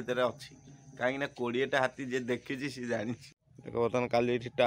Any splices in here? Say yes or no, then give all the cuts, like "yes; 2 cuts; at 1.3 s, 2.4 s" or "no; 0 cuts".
yes; 1 cut; at 3.3 s